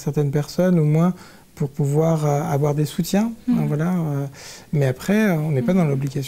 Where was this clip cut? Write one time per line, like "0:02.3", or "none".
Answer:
none